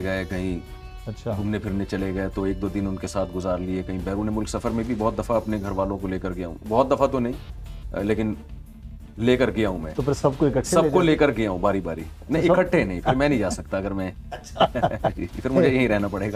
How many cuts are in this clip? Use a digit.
0